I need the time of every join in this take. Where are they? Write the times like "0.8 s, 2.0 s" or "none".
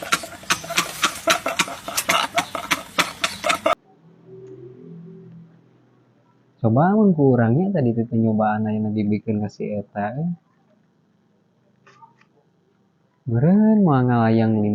3.7 s